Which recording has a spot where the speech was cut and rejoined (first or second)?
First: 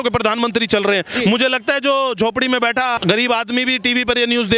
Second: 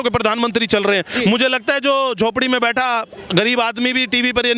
first